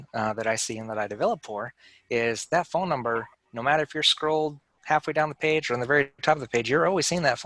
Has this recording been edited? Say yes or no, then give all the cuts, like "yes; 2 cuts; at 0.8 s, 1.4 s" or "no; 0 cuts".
no; 0 cuts